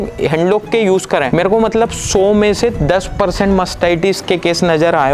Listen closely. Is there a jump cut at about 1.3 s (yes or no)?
yes